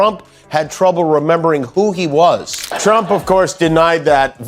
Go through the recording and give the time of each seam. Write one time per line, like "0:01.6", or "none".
0:02.5